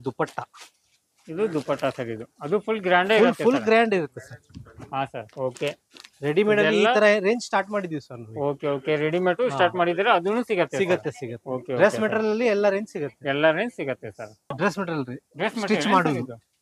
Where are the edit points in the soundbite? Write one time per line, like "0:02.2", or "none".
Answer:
0:05.2
0:14.5